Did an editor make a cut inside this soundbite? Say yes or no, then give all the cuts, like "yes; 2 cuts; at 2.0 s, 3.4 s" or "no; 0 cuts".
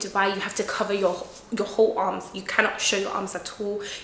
no; 0 cuts